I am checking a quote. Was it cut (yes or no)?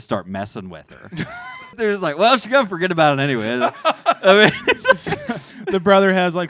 yes